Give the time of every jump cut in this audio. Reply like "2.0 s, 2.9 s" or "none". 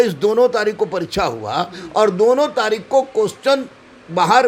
none

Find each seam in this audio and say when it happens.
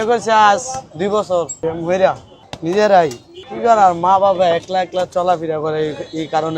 1.5 s, 2.3 s

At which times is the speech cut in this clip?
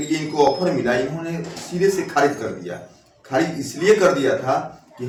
none

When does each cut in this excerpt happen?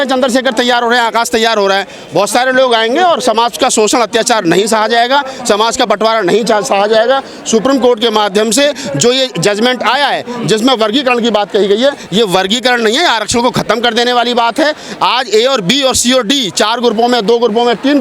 none

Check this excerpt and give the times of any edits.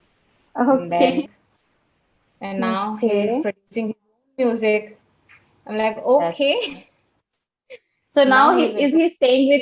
1.2 s

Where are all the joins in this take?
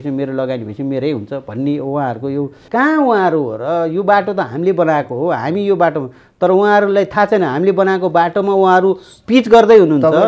2.6 s

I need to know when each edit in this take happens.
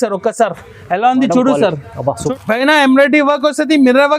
2.3 s

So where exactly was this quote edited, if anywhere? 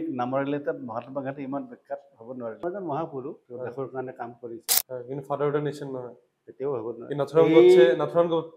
2.6 s

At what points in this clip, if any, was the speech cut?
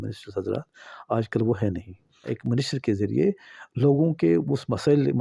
2.4 s

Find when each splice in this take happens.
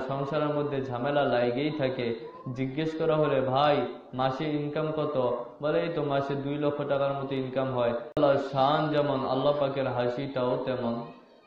8.1 s

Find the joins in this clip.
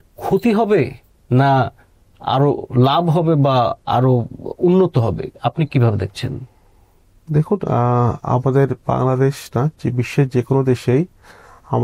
none

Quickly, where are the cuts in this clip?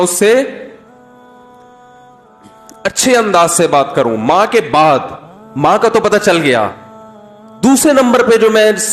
0.8 s, 2.8 s

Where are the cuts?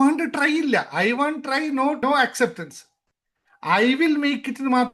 2.0 s

